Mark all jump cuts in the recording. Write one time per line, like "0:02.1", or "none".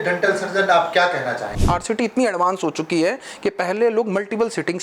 0:01.6